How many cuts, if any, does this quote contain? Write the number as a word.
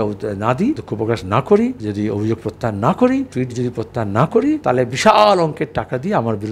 four